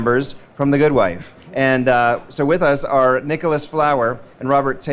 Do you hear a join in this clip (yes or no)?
yes